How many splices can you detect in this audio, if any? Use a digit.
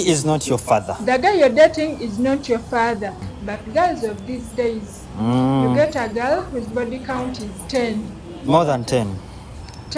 1